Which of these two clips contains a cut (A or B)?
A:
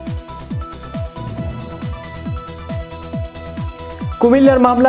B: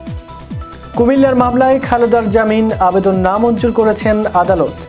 B